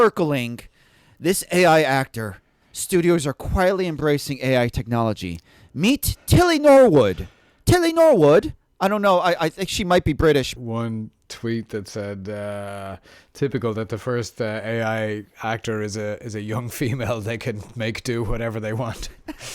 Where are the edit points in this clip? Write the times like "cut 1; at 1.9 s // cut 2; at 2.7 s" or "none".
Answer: cut 1; at 10.6 s